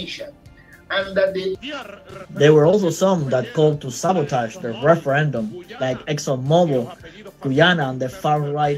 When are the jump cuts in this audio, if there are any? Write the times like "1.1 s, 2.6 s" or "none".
1.6 s